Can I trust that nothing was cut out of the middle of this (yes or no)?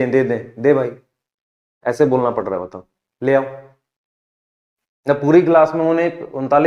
yes